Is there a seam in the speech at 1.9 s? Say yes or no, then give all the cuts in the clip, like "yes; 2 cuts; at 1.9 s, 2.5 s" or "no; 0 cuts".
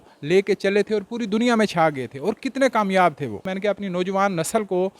no; 1 cut; at 3.5 s